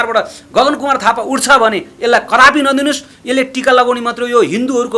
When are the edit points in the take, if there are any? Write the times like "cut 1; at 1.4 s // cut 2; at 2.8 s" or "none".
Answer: none